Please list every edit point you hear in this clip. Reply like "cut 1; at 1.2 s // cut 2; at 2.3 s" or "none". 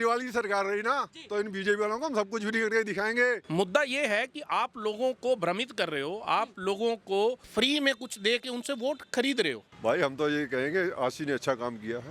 cut 1; at 3.4 s // cut 2; at 9.7 s